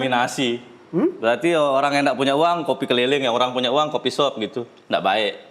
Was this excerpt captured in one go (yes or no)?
yes